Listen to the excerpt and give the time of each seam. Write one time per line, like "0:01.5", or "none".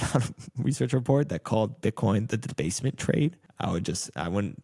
0:03.5